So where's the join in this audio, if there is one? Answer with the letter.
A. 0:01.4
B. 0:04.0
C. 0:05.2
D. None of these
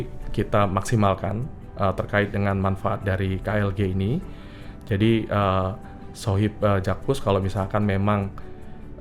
D